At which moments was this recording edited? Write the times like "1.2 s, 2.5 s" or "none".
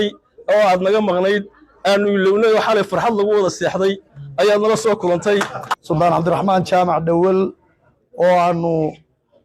5.6 s